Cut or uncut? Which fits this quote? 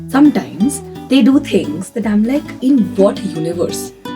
cut